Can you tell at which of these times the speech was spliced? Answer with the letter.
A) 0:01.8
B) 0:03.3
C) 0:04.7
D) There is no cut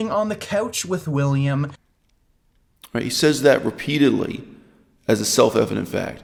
D